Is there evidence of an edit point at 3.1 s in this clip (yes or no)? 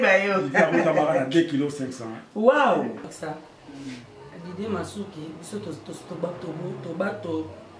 yes